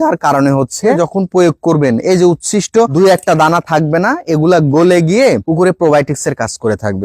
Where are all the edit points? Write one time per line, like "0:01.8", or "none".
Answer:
0:01.0
0:02.9